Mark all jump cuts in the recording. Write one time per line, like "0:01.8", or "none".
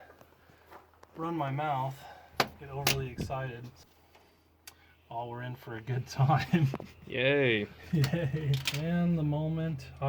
0:03.7
0:08.7